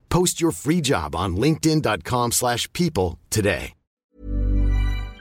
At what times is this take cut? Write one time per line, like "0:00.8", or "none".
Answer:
0:04.0